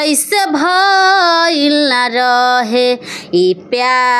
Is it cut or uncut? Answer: uncut